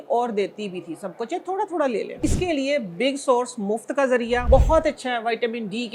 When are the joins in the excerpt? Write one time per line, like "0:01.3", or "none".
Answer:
0:02.2
0:04.4